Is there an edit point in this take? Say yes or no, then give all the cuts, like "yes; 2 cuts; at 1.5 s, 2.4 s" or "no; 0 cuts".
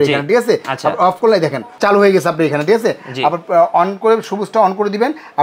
yes; 1 cut; at 1.6 s